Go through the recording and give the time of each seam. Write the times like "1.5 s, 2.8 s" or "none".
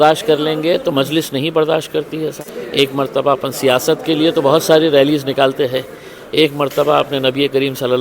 2.5 s

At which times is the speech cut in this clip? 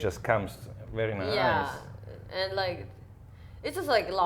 none

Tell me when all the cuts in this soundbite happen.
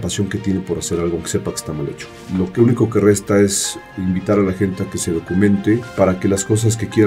2.1 s, 5.9 s

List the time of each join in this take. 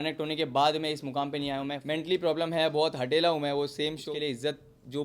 1.8 s, 4.0 s

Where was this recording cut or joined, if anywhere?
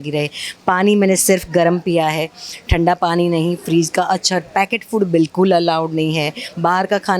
none

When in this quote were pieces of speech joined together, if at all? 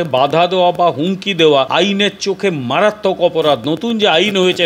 1.7 s

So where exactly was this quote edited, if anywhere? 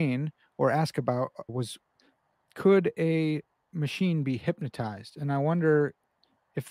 1.5 s

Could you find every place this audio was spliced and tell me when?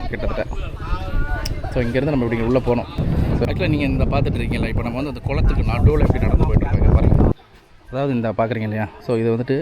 3.0 s, 7.3 s

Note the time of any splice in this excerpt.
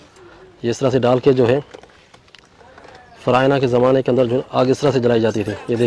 none

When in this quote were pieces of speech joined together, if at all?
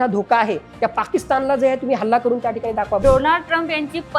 3.0 s

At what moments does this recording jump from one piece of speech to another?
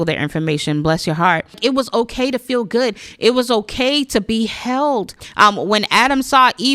1.6 s, 5.2 s

